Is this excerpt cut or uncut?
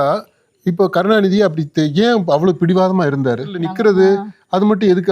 cut